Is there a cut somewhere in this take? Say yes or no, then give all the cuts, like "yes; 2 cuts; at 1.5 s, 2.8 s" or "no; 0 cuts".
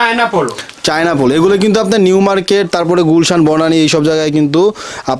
no; 0 cuts